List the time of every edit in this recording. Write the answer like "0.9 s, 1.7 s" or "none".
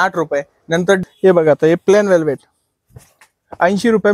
1.0 s